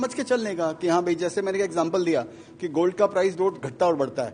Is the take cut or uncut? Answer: uncut